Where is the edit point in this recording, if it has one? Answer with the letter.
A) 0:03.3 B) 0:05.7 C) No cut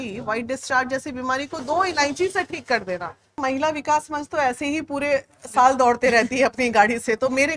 A